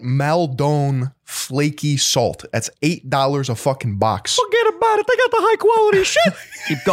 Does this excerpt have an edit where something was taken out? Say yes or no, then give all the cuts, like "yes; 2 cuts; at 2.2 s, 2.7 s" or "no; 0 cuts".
no; 0 cuts